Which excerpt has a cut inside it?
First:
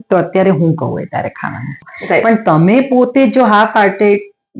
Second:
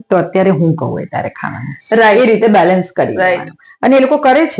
first; 1 cut; at 1.7 s

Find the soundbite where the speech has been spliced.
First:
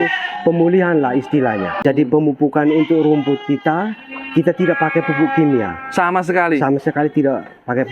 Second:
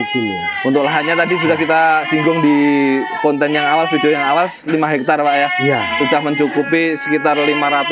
first; 1 cut; at 1.8 s

